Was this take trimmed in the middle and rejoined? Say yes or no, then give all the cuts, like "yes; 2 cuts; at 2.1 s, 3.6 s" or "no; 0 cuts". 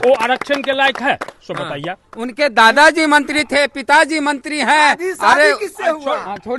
no; 0 cuts